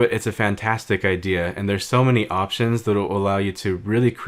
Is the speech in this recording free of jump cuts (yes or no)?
yes